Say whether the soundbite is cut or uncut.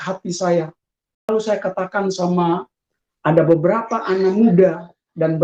cut